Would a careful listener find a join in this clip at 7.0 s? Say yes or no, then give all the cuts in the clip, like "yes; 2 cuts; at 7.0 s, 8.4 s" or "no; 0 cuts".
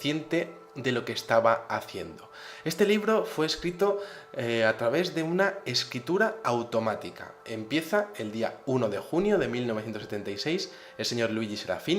no; 1 cut; at 2.9 s